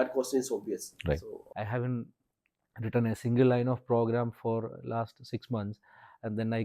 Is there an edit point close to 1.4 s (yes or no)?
yes